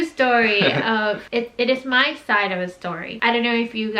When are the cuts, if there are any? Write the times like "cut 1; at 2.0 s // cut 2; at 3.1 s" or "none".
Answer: cut 1; at 1.2 s